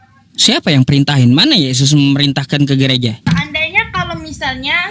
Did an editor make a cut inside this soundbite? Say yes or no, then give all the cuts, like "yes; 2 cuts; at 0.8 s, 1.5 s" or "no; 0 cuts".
yes; 1 cut; at 3.3 s